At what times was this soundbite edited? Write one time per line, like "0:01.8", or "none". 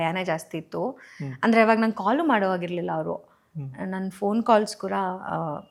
none